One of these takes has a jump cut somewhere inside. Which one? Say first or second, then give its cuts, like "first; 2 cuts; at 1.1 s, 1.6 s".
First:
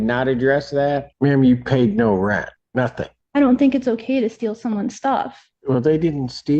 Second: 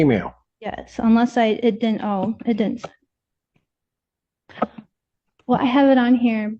first; 3 cuts; at 1.1 s, 2.9 s, 5.4 s